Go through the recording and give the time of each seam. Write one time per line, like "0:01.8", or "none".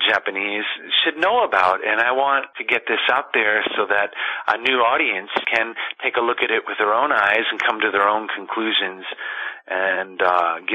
0:02.5
0:05.5